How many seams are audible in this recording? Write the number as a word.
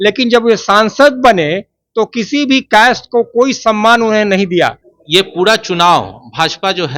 one